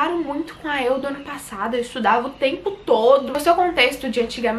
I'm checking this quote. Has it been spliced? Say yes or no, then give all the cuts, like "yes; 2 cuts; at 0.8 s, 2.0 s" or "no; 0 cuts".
yes; 1 cut; at 3.3 s